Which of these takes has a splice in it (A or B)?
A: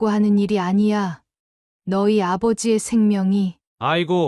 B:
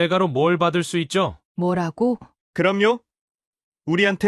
B